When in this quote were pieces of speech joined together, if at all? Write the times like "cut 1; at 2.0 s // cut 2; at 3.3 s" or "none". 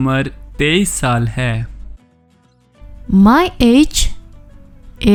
none